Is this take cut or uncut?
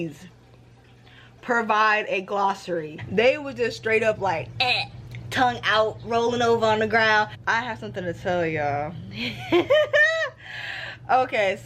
cut